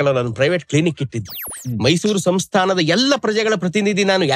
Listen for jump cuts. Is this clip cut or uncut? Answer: cut